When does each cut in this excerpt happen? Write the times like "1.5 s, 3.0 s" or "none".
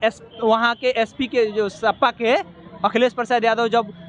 none